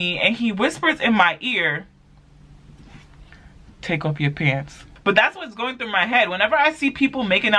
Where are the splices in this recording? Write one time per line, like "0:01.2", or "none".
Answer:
0:04.8